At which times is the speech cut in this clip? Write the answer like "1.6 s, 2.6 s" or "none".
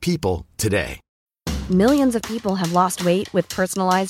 none